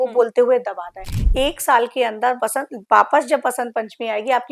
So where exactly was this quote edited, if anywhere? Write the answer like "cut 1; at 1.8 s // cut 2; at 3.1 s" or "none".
none